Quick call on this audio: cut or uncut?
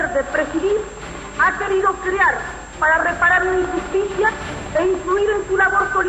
uncut